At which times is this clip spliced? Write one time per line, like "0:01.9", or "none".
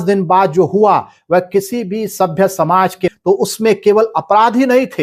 0:03.1